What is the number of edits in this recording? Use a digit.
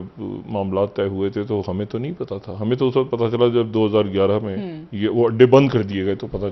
0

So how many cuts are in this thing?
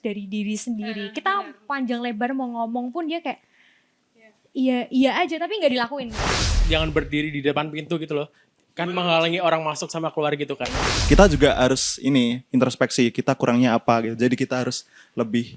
2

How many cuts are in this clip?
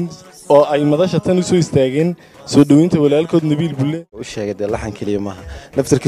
1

